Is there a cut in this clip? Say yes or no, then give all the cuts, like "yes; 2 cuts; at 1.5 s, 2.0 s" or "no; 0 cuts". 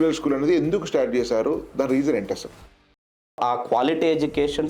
yes; 1 cut; at 3.0 s